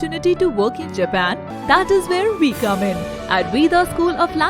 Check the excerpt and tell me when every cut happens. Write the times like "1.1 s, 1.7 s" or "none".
1.5 s